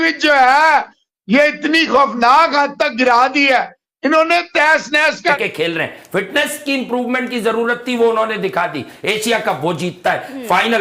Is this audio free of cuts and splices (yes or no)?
no